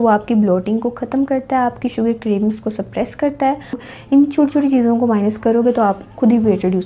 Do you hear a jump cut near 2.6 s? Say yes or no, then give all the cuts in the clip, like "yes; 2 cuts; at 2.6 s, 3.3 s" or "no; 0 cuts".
no; 1 cut; at 3.9 s